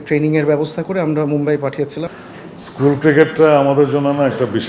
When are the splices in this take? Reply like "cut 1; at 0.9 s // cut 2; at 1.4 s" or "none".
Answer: cut 1; at 2.1 s